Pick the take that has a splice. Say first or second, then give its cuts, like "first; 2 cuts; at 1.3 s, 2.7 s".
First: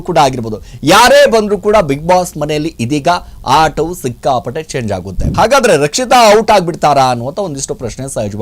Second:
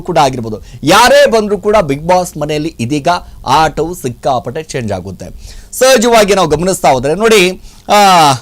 first; 1 cut; at 5.3 s